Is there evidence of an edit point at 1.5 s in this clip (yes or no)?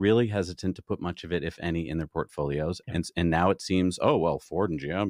no